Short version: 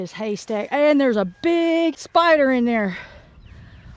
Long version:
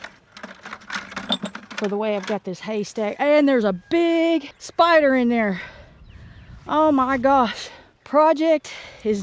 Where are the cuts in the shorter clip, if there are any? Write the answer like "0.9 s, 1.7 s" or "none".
2.0 s

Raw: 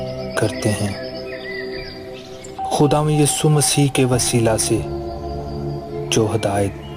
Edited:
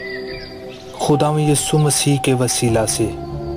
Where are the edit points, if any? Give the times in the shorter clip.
1.0 s

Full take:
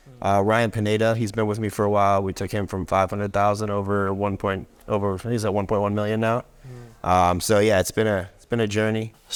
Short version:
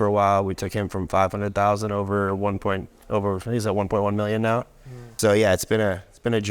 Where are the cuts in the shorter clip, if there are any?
5.1 s

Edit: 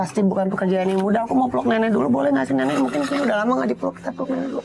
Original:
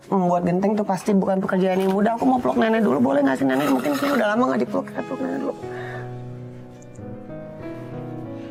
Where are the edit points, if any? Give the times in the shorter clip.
none

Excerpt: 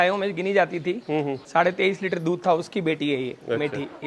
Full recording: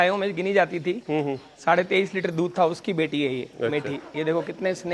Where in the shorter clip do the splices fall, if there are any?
1.4 s

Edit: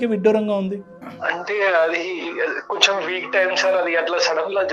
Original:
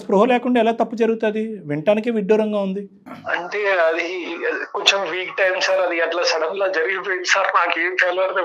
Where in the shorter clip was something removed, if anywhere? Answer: none

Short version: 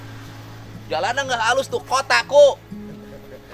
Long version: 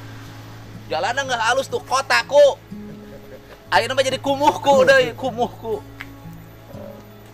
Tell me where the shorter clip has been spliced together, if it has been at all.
none

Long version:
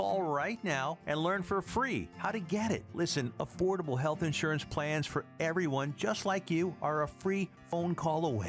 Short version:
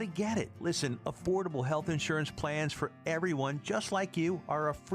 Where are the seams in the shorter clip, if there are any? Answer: none

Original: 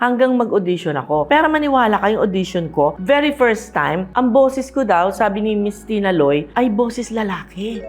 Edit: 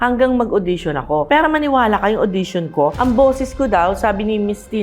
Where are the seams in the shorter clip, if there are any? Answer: 2.9 s

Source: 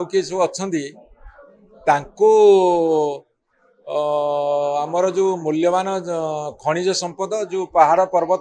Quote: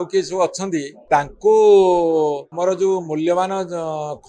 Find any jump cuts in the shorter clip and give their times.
0.9 s, 2.5 s

